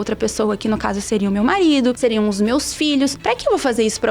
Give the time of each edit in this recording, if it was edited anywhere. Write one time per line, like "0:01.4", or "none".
0:02.0
0:03.2